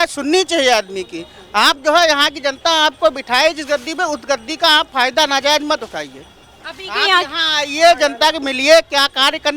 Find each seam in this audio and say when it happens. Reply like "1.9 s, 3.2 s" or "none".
none